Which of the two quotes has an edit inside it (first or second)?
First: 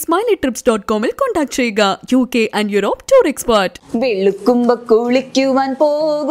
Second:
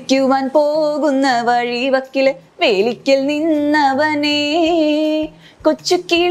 first